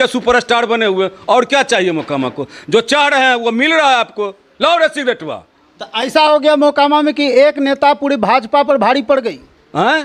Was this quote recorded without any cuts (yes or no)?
yes